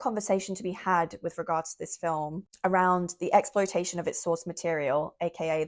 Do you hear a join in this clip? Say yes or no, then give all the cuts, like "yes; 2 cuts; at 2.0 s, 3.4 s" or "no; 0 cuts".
yes; 1 cut; at 2.5 s